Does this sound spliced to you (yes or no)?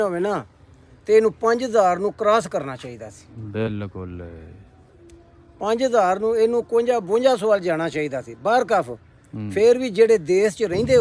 no